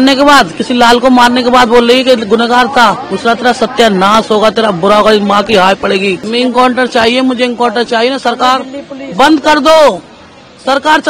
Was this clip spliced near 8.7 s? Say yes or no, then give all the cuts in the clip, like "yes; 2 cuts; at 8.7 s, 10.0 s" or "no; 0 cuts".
no; 2 cuts; at 3.1 s, 6.2 s